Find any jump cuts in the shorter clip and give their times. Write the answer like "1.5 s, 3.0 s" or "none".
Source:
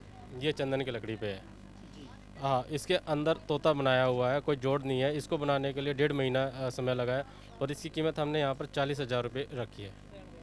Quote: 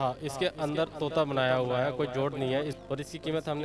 2.7 s

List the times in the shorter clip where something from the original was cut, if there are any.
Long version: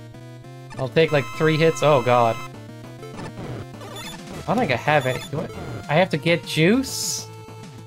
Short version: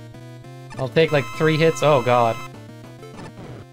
none

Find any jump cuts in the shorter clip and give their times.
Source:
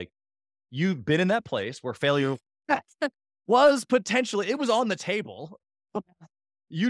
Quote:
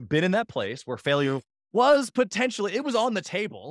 1.5 s

